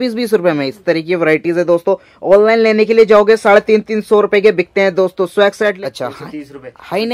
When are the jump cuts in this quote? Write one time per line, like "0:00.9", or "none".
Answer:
0:05.8